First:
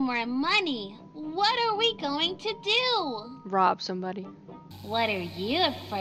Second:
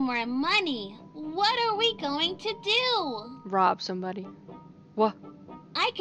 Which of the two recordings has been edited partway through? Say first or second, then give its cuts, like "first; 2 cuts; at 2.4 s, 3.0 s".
first; 1 cut; at 4.7 s